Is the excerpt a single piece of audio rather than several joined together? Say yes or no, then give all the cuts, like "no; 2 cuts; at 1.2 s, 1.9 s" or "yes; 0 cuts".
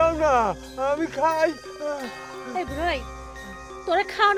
yes; 0 cuts